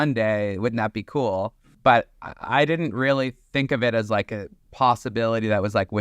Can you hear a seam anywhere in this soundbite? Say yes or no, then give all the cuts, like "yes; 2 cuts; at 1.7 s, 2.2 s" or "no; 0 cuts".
yes; 1 cut; at 1.6 s